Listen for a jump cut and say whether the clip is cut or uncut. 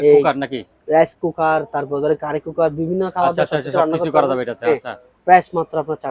uncut